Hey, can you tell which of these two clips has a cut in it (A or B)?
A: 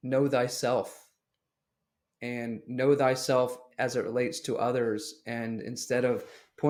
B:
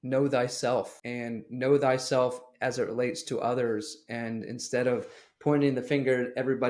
B